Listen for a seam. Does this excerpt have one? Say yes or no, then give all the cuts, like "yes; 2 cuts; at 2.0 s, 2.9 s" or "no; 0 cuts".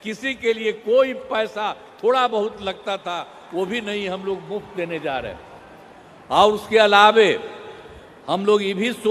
no; 0 cuts